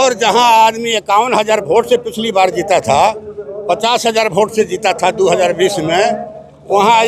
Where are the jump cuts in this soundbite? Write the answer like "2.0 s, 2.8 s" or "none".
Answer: none